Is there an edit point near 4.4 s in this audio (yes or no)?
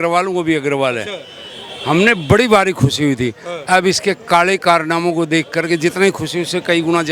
no